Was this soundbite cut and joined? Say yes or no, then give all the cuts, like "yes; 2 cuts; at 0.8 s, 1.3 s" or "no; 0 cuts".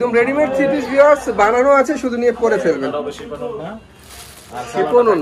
no; 0 cuts